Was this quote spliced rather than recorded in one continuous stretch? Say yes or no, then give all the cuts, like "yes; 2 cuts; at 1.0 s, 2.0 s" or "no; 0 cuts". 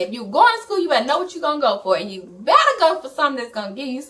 no; 0 cuts